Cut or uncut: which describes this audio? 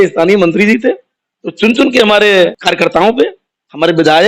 cut